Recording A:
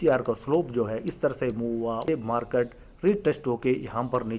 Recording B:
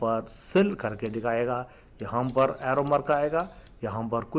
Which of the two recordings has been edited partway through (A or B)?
A